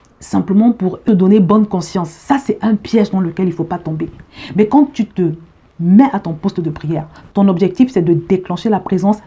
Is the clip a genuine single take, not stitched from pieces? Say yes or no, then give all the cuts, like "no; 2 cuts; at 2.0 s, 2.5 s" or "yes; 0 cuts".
no; 1 cut; at 1.0 s